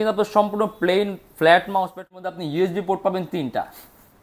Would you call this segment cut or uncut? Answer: cut